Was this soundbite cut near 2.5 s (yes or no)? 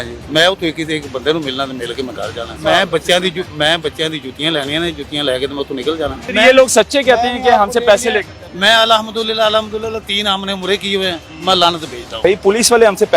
yes